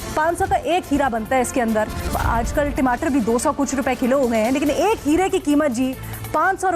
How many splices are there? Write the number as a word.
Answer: one